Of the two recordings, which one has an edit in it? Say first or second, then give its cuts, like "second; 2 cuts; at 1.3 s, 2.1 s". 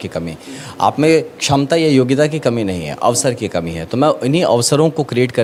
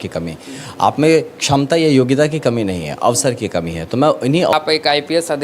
second; 1 cut; at 4.5 s